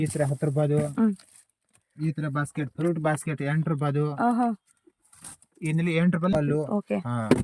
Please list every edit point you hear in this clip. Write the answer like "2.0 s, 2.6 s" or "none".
6.4 s